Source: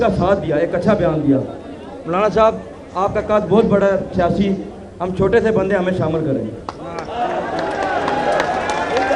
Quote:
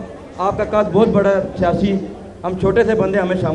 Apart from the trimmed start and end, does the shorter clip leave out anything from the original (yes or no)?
no